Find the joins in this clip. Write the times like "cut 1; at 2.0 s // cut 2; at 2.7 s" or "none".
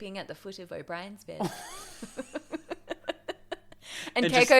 none